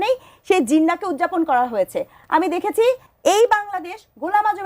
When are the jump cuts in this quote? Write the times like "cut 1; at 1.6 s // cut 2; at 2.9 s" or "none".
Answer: cut 1; at 3.1 s